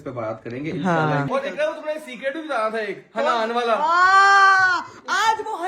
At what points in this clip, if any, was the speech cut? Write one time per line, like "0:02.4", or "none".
0:01.3